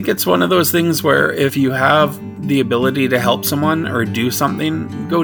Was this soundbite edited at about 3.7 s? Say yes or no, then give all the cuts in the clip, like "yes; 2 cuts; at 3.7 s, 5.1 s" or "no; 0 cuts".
no; 2 cuts; at 1.5 s, 2.3 s